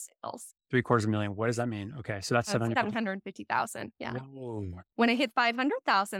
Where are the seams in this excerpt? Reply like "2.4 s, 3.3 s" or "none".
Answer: 4.8 s